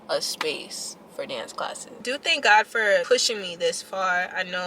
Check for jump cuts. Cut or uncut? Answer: cut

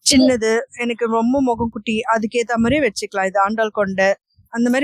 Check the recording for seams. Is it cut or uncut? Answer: uncut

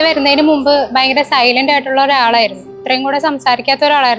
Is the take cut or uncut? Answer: uncut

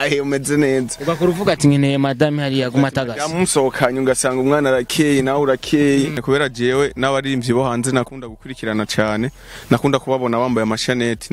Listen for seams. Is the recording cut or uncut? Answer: cut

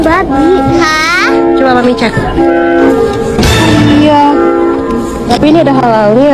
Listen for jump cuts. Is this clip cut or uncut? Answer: cut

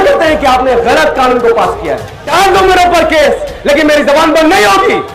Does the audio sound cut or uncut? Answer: cut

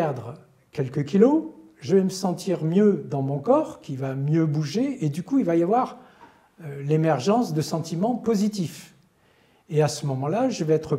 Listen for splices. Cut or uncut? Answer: uncut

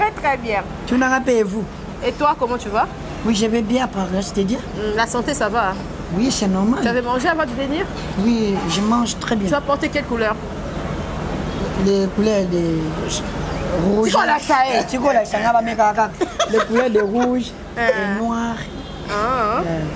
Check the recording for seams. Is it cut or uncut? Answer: uncut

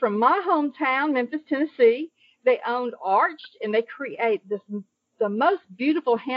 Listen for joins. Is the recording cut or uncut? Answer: uncut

